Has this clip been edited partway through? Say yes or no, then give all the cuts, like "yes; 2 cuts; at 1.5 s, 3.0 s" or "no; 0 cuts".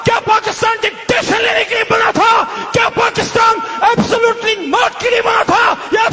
no; 0 cuts